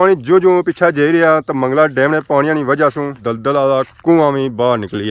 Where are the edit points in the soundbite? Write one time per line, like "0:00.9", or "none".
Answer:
0:03.2